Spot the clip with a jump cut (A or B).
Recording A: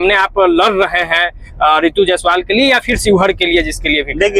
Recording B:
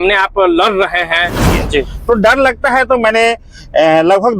B